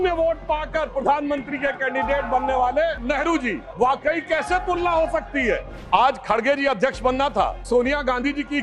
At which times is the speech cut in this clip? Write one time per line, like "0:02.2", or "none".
0:03.4
0:05.7
0:07.7